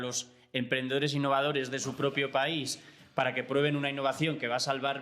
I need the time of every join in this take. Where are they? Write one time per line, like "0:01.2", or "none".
none